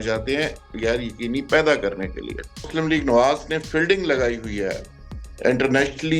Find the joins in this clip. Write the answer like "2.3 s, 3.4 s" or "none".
2.7 s